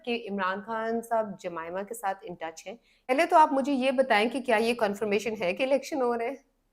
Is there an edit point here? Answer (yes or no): yes